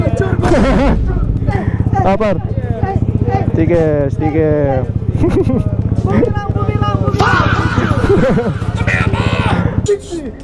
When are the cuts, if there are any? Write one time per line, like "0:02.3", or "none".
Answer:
none